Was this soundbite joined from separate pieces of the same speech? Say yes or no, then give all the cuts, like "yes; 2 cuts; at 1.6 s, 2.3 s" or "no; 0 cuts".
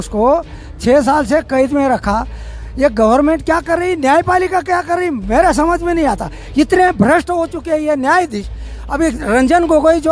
no; 0 cuts